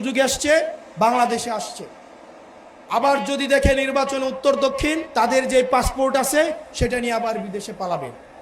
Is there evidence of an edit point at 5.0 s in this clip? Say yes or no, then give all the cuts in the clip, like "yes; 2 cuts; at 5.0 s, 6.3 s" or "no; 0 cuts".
yes; 1 cut; at 5.0 s